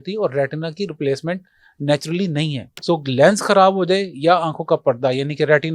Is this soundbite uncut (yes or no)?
no